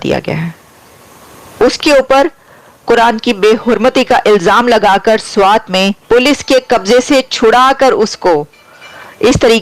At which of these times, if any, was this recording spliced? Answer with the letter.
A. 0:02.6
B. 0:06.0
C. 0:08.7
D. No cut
B